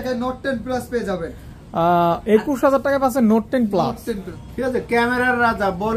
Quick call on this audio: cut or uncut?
cut